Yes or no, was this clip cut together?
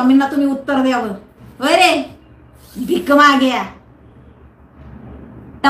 no